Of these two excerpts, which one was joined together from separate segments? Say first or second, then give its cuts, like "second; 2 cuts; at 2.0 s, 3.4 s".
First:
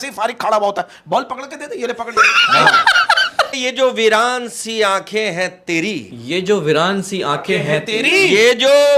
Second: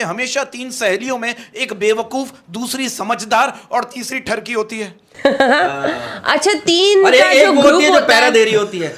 first; 1 cut; at 3.6 s